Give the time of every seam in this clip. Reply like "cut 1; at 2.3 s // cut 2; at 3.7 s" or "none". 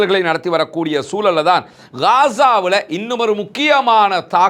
none